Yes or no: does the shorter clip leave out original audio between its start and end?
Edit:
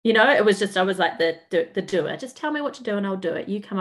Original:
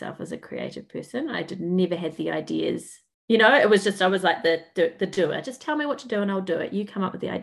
no